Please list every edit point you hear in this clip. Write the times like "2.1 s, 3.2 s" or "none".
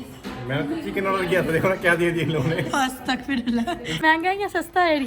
4.0 s